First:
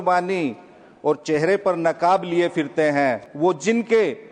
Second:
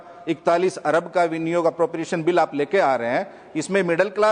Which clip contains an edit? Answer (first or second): first